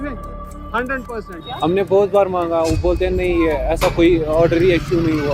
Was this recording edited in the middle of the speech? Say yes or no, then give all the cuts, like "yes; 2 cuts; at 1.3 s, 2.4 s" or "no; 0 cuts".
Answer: yes; 1 cut; at 1.6 s